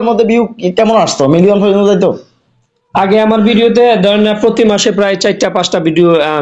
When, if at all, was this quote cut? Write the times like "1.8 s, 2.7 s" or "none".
none